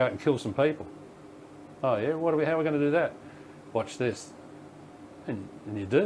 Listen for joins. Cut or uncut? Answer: cut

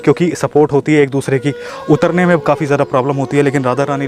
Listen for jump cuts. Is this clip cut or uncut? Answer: uncut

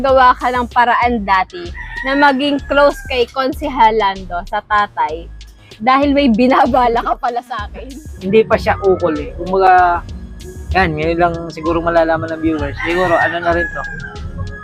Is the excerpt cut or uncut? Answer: cut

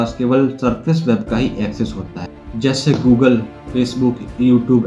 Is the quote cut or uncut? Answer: uncut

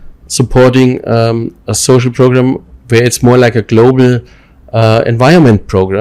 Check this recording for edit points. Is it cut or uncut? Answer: uncut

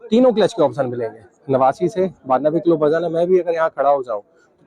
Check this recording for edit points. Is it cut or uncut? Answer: cut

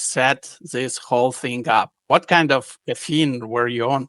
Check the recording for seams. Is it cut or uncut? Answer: cut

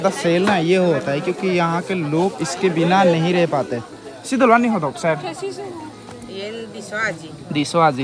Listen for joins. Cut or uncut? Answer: uncut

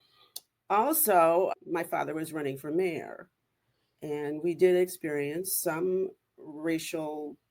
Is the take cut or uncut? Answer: cut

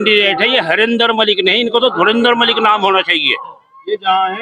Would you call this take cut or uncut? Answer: uncut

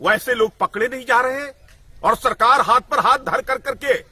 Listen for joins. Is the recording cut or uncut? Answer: uncut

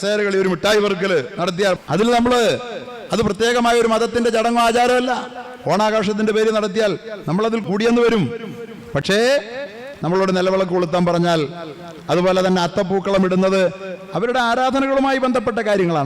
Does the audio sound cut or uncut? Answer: cut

